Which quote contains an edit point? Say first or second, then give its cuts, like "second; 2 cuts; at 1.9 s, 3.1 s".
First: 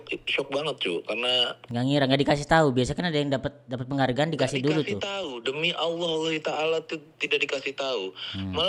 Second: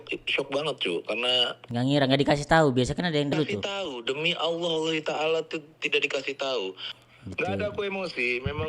second; 2 cuts; at 3.3 s, 6.9 s